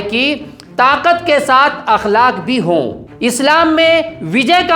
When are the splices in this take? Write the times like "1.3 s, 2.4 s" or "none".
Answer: 3.0 s